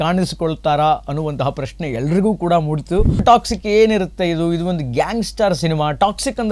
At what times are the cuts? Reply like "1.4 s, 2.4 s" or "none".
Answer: 3.2 s